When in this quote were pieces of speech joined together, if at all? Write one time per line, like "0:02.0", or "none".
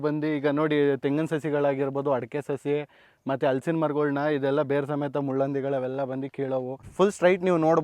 0:06.9